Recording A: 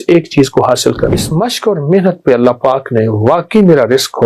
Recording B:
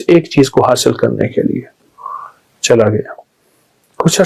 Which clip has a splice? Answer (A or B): A